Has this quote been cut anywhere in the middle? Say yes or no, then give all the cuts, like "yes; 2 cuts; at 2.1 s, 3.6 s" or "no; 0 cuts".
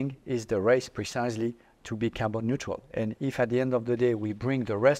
no; 0 cuts